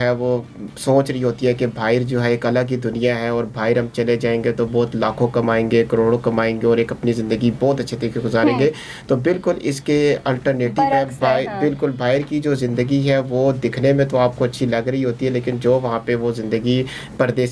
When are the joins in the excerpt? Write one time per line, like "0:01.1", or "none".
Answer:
none